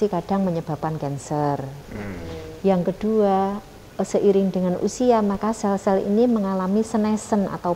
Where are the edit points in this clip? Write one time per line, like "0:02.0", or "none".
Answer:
none